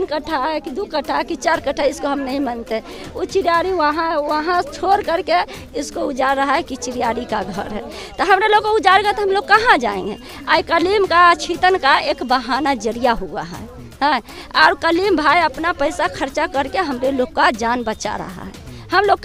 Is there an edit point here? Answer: no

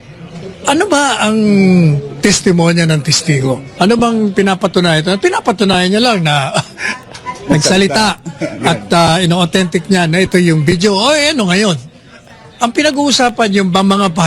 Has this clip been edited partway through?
yes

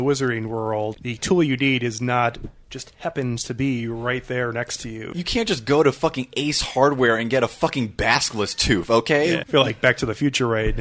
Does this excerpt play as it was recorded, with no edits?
no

